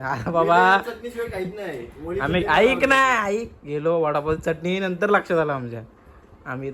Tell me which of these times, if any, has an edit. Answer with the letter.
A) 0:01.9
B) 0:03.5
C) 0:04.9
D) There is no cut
D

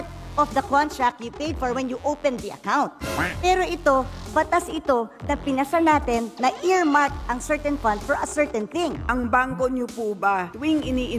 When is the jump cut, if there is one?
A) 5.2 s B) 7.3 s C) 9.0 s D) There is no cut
C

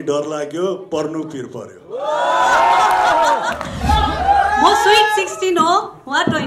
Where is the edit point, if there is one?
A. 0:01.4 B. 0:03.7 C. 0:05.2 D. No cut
B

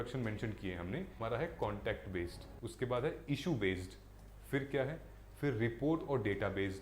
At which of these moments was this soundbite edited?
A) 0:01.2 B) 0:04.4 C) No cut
A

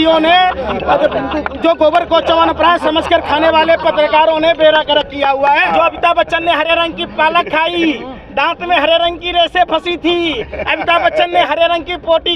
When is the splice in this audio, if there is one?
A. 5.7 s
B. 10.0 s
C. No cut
A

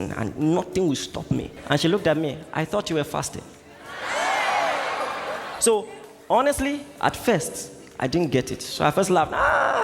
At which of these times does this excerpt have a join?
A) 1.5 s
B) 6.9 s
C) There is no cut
A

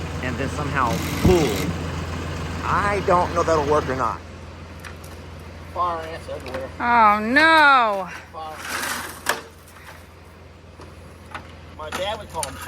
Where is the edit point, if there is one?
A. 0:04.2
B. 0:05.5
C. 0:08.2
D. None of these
A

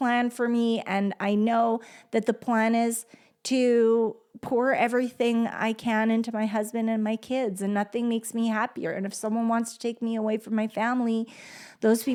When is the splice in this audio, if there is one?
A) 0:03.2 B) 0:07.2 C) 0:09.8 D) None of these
D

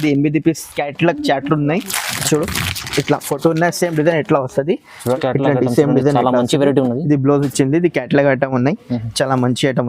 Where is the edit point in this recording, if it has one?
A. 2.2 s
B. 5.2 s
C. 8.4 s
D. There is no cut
B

